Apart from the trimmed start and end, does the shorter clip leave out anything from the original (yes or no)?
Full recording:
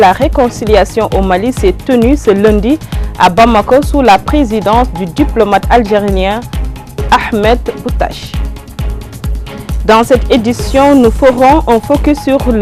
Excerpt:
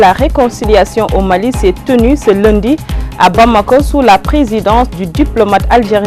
no